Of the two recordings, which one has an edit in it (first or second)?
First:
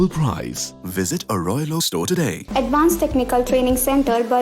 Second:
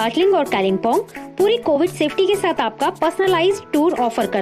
first